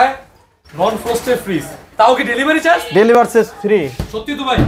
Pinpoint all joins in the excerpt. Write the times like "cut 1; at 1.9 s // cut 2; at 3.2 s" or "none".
none